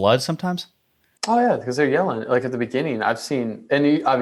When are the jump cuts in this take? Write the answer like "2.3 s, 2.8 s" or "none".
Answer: none